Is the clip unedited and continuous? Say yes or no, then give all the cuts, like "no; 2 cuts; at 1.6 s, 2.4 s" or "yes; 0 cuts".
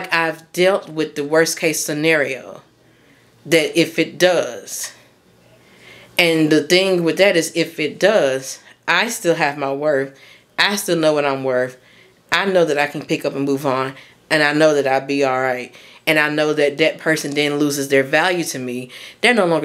yes; 0 cuts